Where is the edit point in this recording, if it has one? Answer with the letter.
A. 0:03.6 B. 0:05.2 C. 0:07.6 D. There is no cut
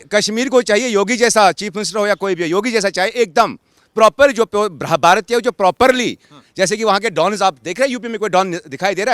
D